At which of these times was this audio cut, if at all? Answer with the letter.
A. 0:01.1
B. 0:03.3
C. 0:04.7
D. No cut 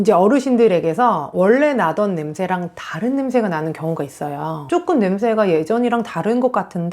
C